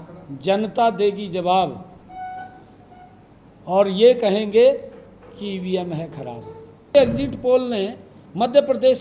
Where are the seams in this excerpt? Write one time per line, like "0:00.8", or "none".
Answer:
0:06.9